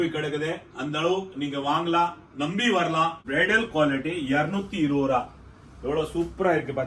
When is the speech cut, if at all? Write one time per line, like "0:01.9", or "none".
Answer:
0:03.2